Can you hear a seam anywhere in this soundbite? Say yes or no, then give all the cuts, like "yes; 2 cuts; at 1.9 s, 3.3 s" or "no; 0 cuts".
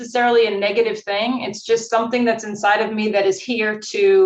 no; 0 cuts